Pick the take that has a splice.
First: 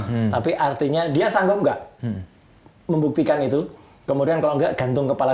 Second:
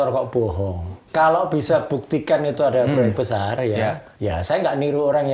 second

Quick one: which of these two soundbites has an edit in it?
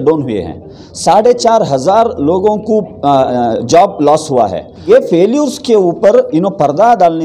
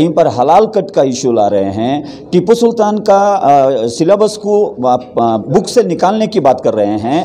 first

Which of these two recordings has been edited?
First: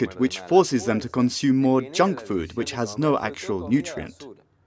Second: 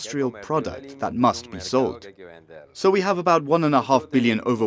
first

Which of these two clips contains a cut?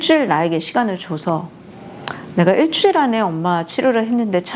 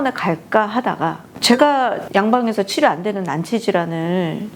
second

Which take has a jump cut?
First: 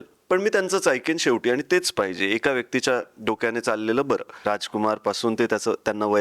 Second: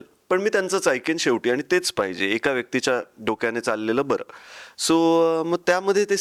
first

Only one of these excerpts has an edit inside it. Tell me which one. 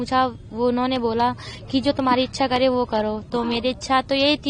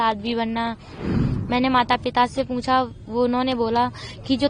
second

